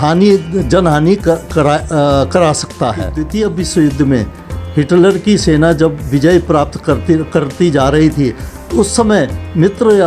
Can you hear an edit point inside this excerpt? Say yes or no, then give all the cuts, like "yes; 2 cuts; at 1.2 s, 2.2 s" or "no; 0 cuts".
yes; 1 cut; at 3.2 s